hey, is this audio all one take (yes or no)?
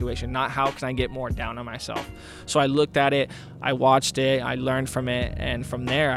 yes